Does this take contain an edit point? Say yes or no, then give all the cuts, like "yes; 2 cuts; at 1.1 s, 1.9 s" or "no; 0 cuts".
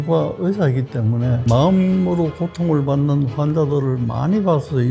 no; 0 cuts